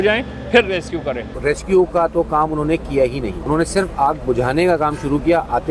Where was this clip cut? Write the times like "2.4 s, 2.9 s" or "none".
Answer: 1.3 s, 3.4 s